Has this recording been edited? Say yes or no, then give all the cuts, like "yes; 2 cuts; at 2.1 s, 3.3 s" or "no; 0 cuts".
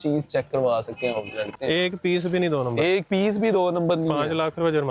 yes; 1 cut; at 1.5 s